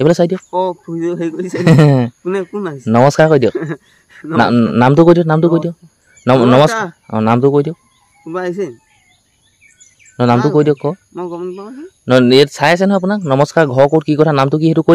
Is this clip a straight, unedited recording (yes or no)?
yes